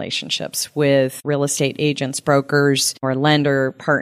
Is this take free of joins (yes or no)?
no